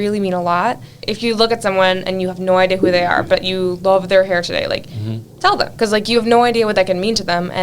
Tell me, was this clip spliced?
yes; 1 cut; at 1.0 s

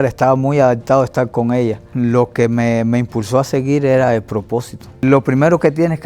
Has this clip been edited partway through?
yes; 2 cuts; at 1.8 s, 5.0 s

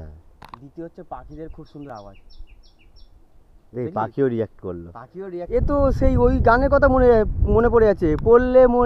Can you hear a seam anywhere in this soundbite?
yes; 1 cut; at 5.4 s

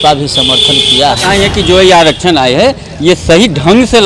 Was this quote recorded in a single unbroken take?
no; 1 cut; at 1.2 s

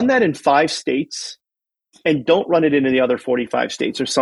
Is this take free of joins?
yes; 0 cuts

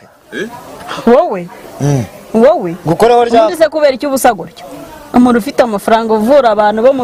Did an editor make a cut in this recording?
no; 0 cuts

